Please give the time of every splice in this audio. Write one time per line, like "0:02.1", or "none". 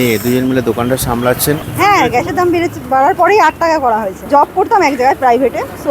0:01.7
0:04.2